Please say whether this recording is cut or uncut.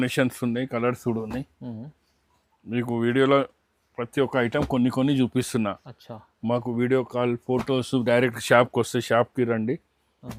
uncut